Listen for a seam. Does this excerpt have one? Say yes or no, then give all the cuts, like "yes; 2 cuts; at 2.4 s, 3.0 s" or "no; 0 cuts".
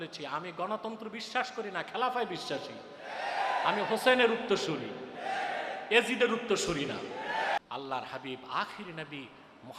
yes; 1 cut; at 7.6 s